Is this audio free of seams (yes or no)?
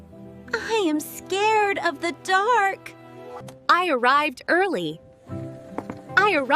no